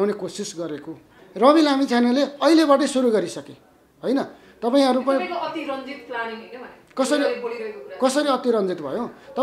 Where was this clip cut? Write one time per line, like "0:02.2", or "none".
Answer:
0:01.2